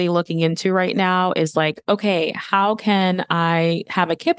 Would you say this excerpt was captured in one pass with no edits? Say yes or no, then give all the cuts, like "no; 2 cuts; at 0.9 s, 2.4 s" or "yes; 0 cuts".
yes; 0 cuts